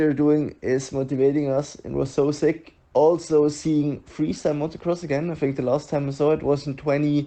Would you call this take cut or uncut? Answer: uncut